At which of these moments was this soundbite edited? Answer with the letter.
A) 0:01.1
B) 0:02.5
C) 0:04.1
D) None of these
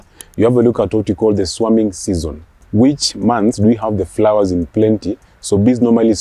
B